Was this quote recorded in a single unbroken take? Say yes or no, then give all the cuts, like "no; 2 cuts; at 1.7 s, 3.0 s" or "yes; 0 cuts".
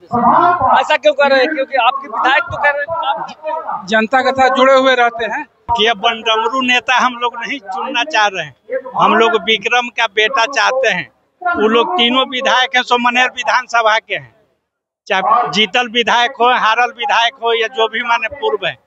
no; 1 cut; at 5.7 s